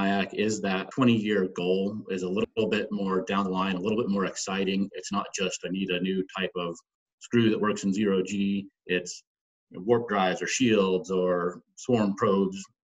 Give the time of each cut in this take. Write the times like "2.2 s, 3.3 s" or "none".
0.9 s, 2.5 s